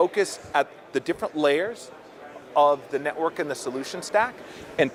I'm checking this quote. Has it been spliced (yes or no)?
no